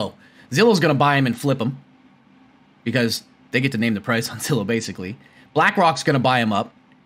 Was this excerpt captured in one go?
yes; 0 cuts

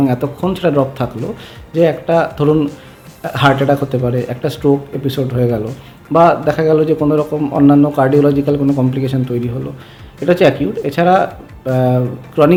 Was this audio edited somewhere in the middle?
no; 0 cuts

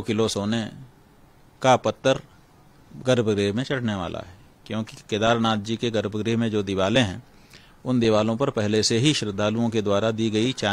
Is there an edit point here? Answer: no; 0 cuts

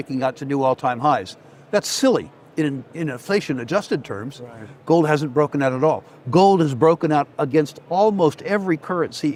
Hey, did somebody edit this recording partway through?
no; 0 cuts

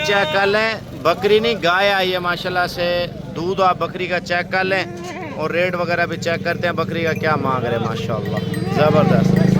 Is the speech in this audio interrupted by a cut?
no; 0 cuts

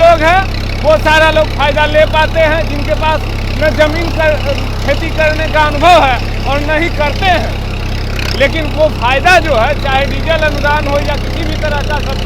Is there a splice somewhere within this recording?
no; 0 cuts

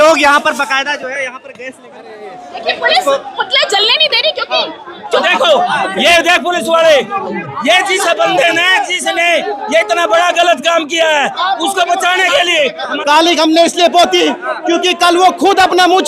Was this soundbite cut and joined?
yes; 2 cuts; at 5.2 s, 12.9 s

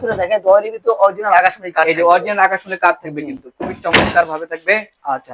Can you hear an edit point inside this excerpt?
no; 0 cuts

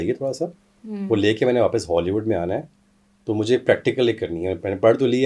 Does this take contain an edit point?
no; 0 cuts

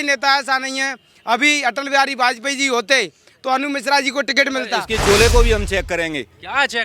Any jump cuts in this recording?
yes; 1 cut; at 4.8 s

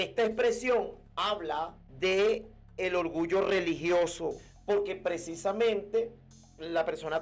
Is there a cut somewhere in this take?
no; 0 cuts

